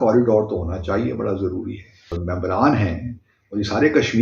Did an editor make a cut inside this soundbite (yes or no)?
yes